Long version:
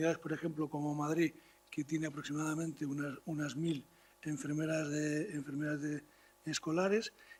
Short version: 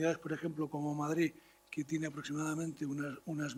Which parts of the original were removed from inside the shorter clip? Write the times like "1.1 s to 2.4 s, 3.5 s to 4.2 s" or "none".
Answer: none